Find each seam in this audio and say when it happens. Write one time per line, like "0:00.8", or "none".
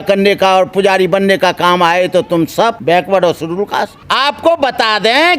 0:02.8
0:04.0